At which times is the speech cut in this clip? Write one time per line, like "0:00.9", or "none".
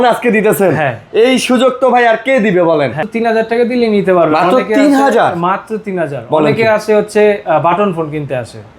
0:03.0